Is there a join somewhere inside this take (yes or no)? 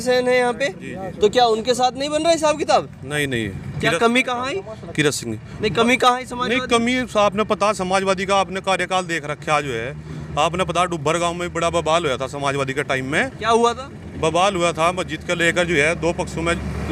no